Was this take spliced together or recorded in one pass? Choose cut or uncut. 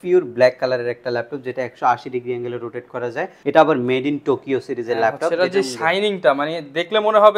cut